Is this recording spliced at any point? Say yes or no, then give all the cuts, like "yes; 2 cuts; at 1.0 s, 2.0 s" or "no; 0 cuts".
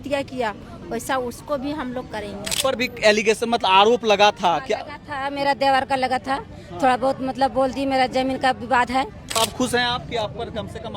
yes; 2 cuts; at 2.6 s, 9.4 s